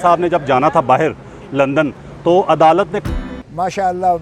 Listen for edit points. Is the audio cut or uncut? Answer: cut